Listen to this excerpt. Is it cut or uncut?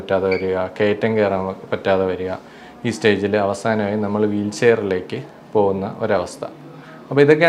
uncut